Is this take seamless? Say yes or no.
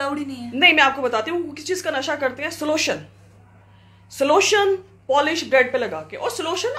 yes